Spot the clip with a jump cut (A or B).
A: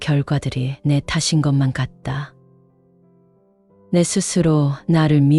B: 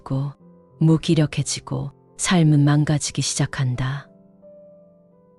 A